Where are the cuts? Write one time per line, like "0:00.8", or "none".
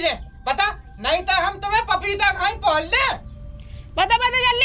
none